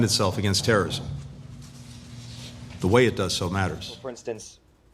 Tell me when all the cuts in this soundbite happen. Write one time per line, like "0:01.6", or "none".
0:04.0